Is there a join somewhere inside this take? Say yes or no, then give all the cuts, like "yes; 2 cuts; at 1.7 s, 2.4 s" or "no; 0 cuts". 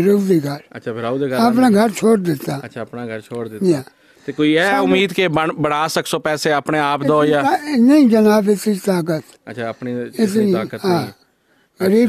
no; 0 cuts